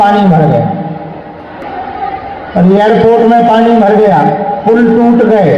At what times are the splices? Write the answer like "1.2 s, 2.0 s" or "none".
1.6 s

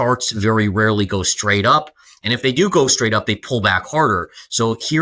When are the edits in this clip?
none

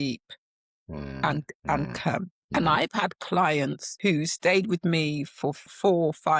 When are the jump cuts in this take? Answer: 2.4 s, 3.8 s, 5.6 s

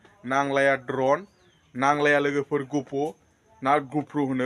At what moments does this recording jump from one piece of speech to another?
none

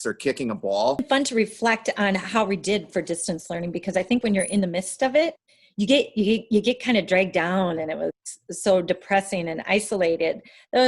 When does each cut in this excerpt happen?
1.0 s

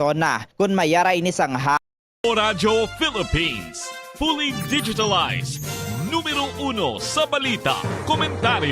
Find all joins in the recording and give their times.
1.8 s

